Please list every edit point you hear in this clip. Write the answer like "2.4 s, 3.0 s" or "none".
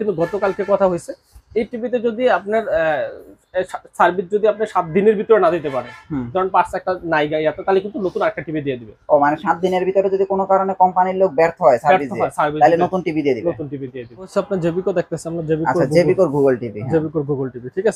14.3 s